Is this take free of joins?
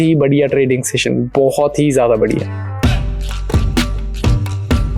no; 1 cut; at 2.7 s

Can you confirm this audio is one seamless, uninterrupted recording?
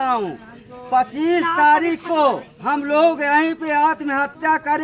yes; 0 cuts

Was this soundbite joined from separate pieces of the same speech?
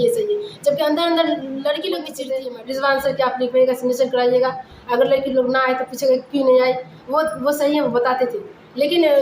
yes; 1 cut; at 2.2 s

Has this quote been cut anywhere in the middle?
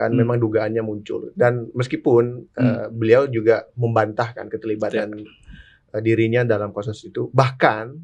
no; 0 cuts

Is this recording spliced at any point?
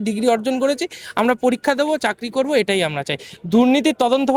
no; 0 cuts

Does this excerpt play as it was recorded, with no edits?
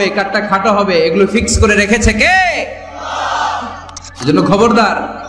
no; 1 cut; at 4.1 s

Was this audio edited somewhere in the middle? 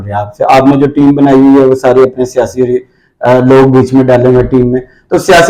no; 0 cuts

